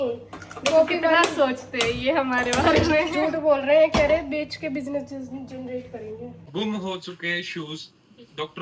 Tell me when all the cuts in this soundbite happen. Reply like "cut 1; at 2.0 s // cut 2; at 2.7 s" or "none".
cut 1; at 6.4 s